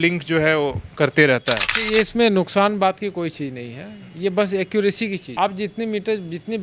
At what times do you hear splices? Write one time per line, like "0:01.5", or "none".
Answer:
none